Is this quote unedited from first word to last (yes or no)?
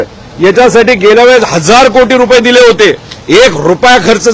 yes